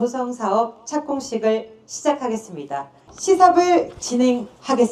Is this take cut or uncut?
uncut